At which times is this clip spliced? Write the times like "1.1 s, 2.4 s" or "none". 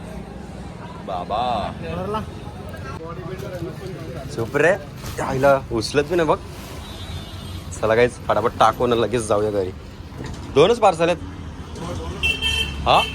2.9 s